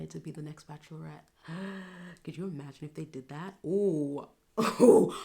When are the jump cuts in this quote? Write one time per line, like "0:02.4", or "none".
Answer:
none